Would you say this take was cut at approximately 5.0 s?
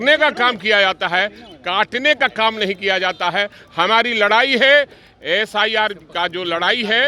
no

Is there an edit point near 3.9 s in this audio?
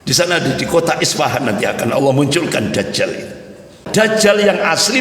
yes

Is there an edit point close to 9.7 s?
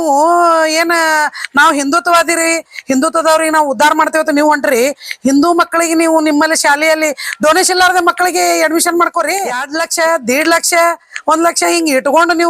yes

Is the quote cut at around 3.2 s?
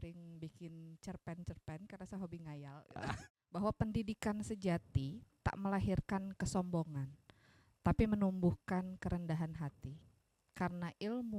yes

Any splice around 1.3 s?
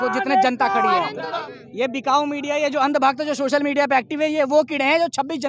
yes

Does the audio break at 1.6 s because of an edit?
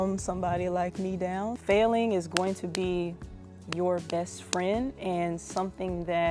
yes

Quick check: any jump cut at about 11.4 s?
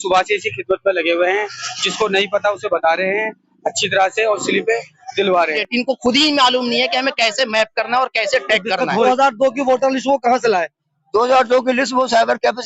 no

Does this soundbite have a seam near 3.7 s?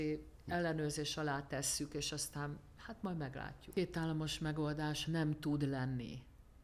yes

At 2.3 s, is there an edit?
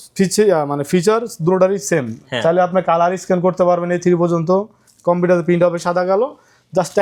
no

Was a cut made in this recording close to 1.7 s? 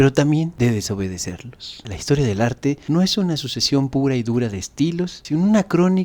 yes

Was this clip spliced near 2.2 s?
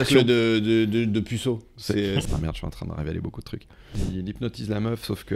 yes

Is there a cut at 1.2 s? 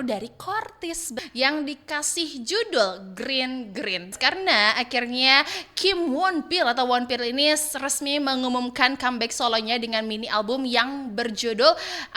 yes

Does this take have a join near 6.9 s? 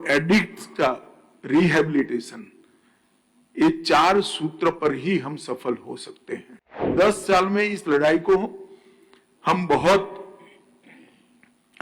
yes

